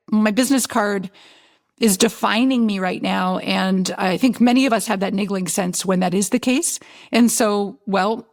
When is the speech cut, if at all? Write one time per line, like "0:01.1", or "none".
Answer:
none